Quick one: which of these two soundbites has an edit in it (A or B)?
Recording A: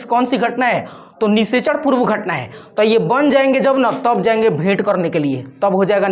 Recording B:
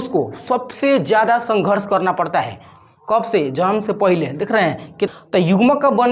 B